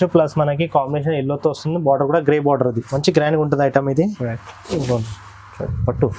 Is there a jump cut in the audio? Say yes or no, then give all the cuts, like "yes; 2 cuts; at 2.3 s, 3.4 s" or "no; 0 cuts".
yes; 1 cut; at 2.9 s